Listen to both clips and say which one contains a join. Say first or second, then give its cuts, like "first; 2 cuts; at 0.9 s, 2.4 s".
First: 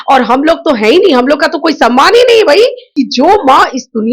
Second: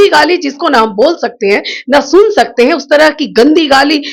first; 1 cut; at 2.8 s